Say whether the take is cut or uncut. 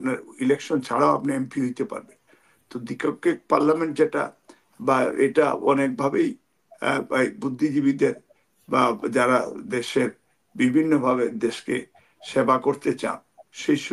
uncut